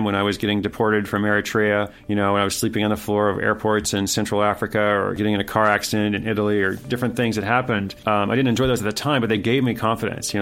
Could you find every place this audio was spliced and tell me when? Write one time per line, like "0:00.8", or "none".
0:02.0
0:05.2
0:07.9